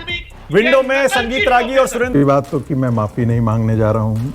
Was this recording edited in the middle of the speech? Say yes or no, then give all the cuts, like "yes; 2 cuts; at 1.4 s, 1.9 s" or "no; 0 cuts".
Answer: yes; 1 cut; at 2.2 s